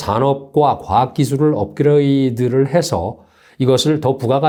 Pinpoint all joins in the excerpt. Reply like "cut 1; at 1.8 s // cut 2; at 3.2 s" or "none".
none